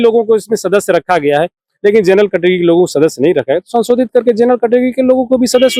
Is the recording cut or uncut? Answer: uncut